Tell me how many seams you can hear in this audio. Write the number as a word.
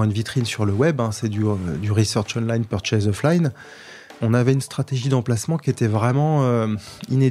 one